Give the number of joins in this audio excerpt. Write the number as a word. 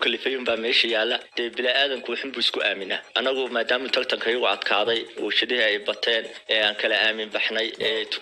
one